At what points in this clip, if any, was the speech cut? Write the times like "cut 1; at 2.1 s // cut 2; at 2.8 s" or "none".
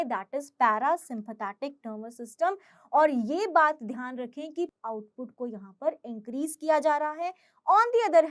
cut 1; at 4.7 s